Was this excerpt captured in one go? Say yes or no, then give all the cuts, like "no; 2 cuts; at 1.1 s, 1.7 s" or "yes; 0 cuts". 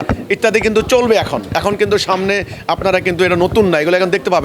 yes; 0 cuts